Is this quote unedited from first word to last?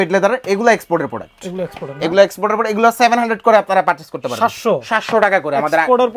yes; 0 cuts

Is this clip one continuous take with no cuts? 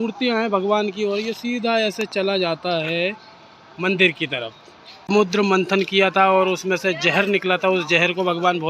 no; 1 cut; at 5.1 s

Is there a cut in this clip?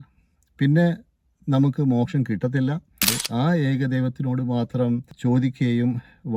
yes; 2 cuts; at 3.2 s, 5.1 s

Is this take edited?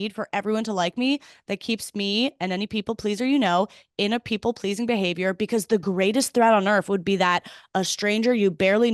no; 0 cuts

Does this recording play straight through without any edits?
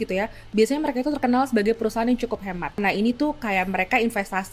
no; 1 cut; at 2.8 s

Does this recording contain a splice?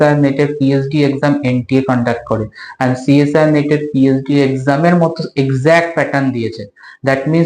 no; 0 cuts

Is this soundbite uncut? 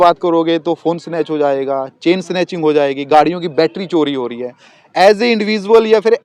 yes; 0 cuts

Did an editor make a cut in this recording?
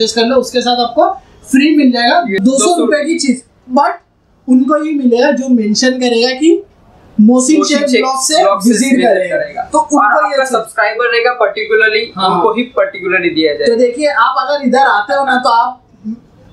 no; 0 cuts

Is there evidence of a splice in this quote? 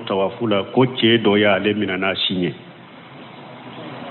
no; 0 cuts

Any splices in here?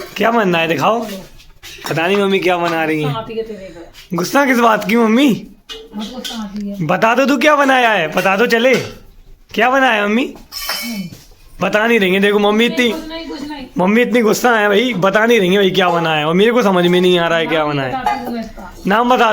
yes; 2 cuts; at 2.9 s, 16.3 s

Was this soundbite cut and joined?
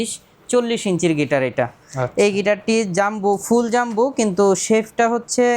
no; 0 cuts

